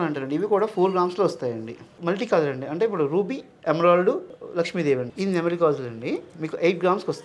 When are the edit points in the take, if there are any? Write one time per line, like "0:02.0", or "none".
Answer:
0:01.9
0:05.1
0:06.3